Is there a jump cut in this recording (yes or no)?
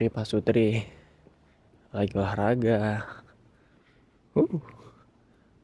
no